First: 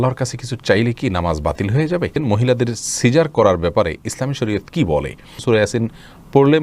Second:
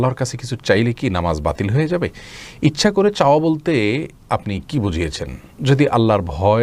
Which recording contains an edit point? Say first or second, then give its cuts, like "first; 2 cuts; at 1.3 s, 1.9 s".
first; 2 cuts; at 2.2 s, 5.3 s